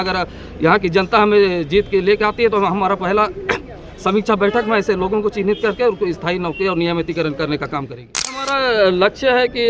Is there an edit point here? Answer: yes; 1 cut; at 8.4 s

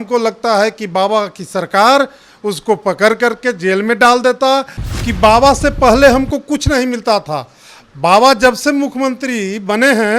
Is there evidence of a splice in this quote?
yes; 1 cut; at 4.8 s

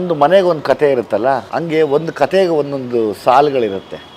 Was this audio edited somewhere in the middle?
yes; 1 cut; at 1.5 s

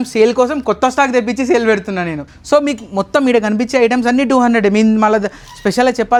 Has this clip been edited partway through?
no; 0 cuts

